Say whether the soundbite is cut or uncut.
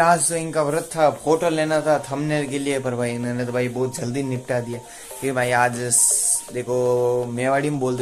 uncut